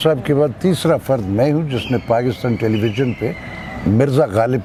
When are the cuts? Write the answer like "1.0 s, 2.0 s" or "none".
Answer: none